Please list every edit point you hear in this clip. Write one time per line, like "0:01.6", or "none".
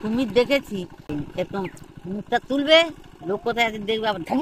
0:01.1